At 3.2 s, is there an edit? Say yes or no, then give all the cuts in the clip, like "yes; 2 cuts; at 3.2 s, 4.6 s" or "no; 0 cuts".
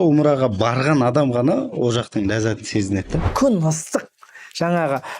yes; 1 cut; at 3.2 s